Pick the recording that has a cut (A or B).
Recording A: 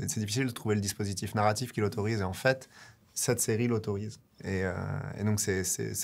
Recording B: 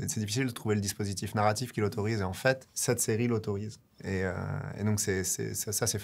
B